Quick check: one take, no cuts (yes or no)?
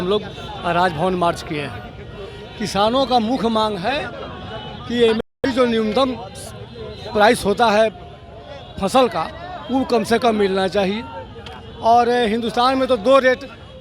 yes